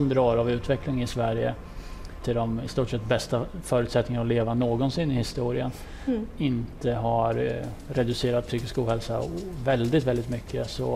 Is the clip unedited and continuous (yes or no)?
no